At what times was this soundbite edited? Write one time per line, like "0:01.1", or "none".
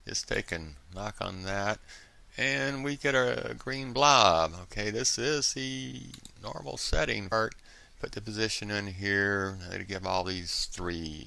none